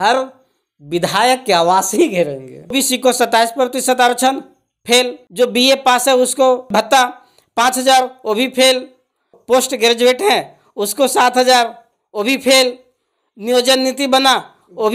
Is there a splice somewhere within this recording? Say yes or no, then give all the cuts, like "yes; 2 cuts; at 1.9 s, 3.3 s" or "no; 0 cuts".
yes; 4 cuts; at 2.7 s, 5.2 s, 6.7 s, 9.3 s